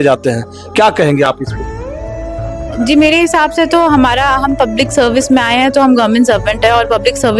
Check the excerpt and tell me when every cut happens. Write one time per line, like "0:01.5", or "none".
none

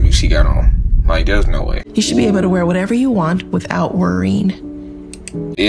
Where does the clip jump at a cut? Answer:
0:01.7

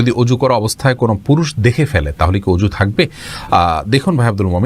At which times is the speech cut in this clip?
none

